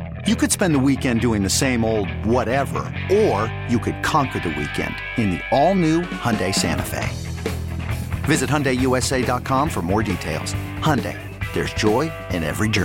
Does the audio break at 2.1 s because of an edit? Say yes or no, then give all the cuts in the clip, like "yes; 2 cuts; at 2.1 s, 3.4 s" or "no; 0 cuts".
no; 0 cuts